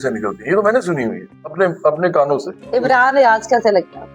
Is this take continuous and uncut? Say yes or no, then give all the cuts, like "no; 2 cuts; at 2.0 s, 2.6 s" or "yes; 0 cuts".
no; 1 cut; at 2.6 s